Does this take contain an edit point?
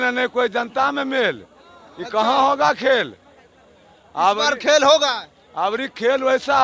no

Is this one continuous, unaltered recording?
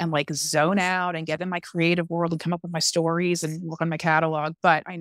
yes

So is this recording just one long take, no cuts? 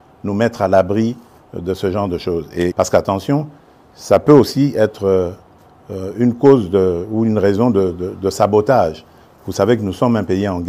no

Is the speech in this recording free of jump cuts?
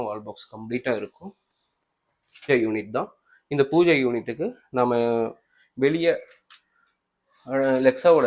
no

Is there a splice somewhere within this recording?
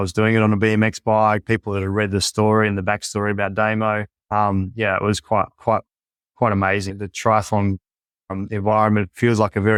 no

